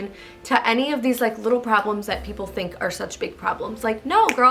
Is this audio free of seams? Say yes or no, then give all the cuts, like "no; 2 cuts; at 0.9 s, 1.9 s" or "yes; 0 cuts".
yes; 0 cuts